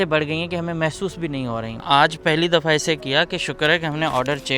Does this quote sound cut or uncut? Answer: cut